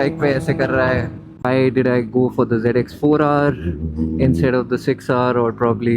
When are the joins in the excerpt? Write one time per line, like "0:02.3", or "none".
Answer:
0:01.3

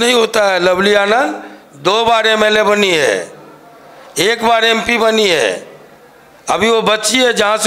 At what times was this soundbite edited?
none

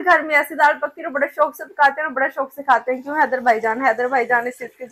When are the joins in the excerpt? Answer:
none

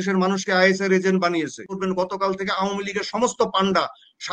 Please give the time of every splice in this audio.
0:01.8

